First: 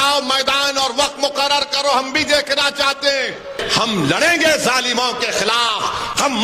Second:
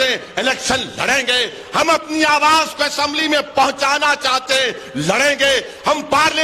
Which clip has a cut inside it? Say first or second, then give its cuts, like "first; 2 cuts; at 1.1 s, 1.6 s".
first; 1 cut; at 3.6 s